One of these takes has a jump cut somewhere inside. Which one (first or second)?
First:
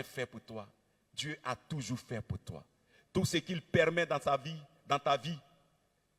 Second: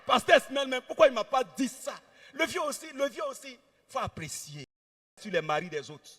second